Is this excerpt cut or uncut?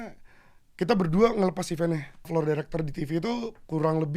cut